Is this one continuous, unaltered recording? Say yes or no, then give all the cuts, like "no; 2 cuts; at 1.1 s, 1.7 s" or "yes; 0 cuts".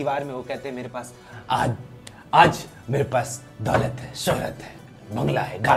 yes; 0 cuts